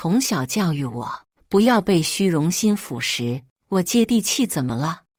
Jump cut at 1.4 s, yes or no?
no